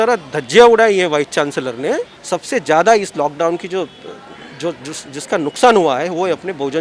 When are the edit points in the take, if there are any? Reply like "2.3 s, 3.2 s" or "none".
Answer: 2.1 s